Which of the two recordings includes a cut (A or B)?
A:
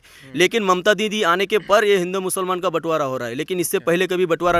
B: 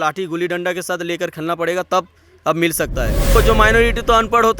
B